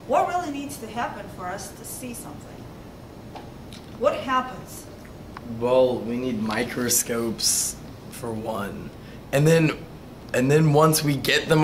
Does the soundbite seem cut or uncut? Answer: cut